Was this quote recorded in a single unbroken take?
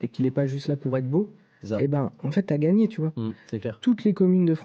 yes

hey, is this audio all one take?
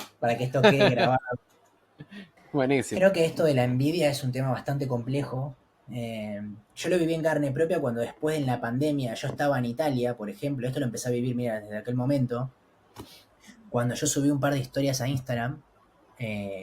no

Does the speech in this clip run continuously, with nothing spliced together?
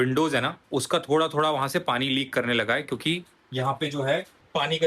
yes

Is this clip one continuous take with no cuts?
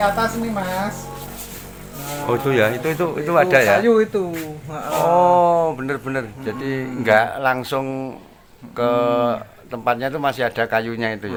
yes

